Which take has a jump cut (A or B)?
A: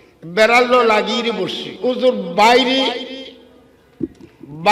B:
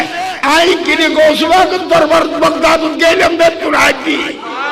A